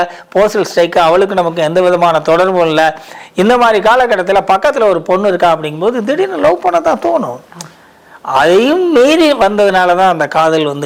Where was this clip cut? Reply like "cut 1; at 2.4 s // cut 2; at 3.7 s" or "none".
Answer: none